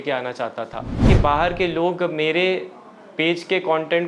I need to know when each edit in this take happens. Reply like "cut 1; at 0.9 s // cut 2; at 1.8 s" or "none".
cut 1; at 1.1 s